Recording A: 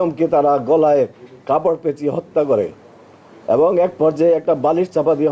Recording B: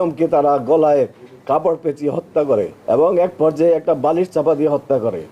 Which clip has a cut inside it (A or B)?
B